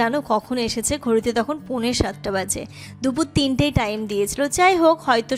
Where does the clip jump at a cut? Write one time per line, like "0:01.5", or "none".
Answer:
none